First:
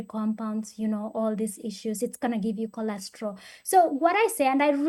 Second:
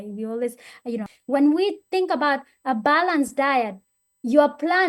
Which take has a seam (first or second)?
second